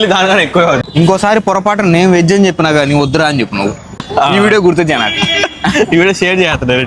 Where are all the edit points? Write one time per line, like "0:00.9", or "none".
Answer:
0:00.8
0:04.0